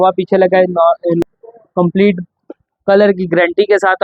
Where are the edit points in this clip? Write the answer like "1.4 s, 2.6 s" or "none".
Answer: 1.2 s